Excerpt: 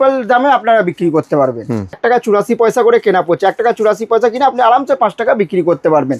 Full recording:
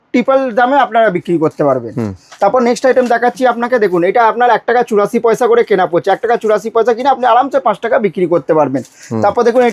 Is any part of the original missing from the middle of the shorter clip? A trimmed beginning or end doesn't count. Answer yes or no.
yes